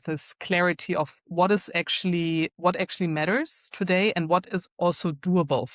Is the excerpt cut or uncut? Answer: uncut